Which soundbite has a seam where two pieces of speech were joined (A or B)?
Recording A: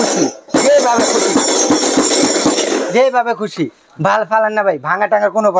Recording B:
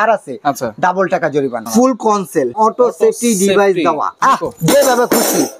B